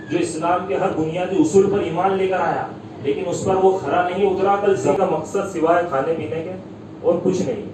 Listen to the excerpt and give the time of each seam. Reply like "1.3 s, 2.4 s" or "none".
4.9 s